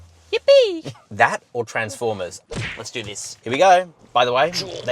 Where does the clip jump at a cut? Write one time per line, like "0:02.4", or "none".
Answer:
0:02.4
0:04.0